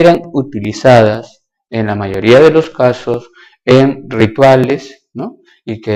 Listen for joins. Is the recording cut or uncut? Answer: uncut